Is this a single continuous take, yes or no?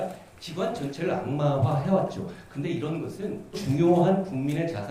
no